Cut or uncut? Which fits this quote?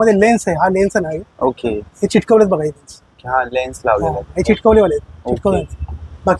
uncut